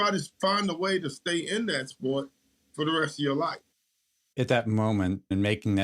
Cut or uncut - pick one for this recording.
cut